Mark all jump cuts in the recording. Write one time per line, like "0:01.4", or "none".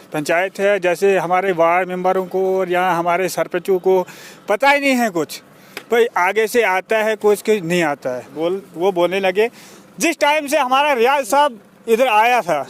0:08.3